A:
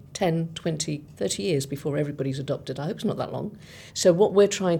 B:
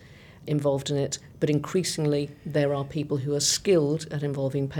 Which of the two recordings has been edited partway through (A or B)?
A